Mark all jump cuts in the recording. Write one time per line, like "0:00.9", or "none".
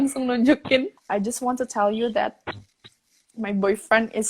0:01.0